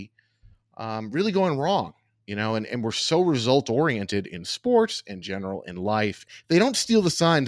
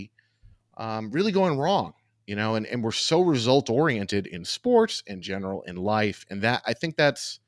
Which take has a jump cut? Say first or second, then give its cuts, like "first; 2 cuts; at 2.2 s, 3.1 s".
first; 1 cut; at 6.3 s